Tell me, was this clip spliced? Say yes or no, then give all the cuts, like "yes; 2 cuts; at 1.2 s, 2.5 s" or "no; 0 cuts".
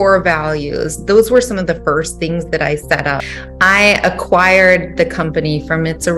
yes; 1 cut; at 3.3 s